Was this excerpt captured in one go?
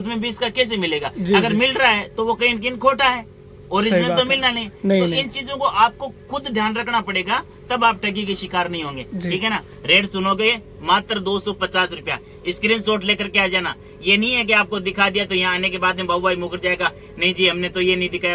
no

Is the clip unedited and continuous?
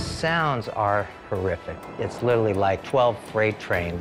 yes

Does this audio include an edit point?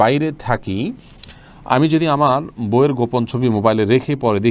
no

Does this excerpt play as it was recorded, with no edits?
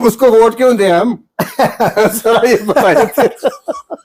yes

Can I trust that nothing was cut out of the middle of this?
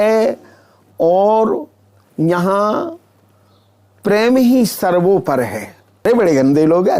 no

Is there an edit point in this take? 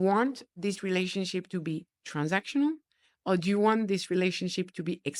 no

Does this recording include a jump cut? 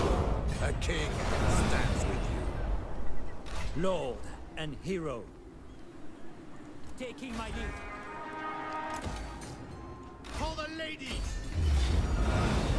no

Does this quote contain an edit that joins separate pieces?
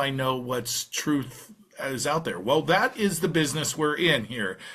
no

